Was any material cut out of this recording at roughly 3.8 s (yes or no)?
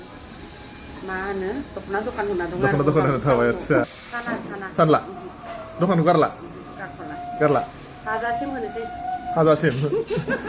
yes